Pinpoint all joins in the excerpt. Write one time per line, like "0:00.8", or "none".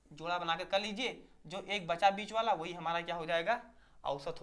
none